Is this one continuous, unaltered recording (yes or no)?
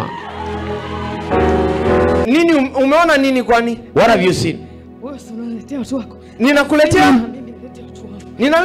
no